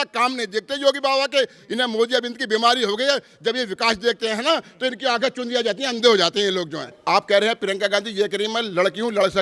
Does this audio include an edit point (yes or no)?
yes